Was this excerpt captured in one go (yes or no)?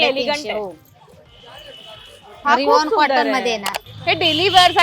no